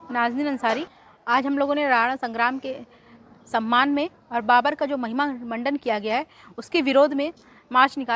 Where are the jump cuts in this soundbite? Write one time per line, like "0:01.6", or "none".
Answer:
0:00.9